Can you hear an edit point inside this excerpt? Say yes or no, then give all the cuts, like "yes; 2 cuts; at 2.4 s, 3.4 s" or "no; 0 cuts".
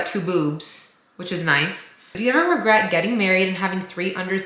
yes; 1 cut; at 2.2 s